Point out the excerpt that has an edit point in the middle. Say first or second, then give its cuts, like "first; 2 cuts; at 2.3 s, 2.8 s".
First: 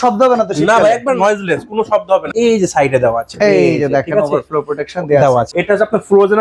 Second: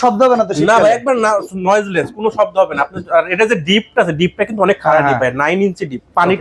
first; 3 cuts; at 1.2 s, 2.3 s, 5.5 s